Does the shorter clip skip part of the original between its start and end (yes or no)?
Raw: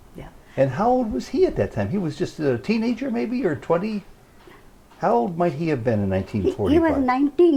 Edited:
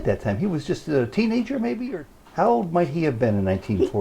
yes